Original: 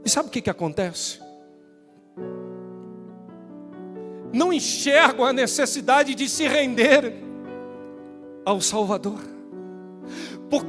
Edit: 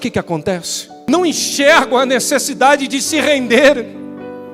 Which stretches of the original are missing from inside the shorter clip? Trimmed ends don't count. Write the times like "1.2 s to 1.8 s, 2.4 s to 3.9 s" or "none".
1.3 s to 4.2 s